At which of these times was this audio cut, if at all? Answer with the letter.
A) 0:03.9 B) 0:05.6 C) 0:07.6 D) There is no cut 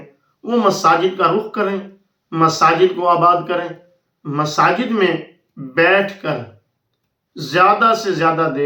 D